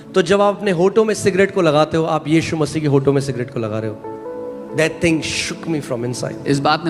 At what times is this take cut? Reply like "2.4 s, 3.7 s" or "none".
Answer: none